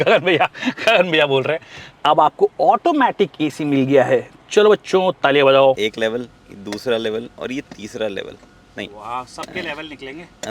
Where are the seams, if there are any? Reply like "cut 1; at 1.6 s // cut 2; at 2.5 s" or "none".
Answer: cut 1; at 1.8 s // cut 2; at 5.8 s